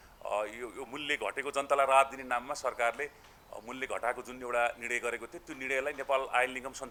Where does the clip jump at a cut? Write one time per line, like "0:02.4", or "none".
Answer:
none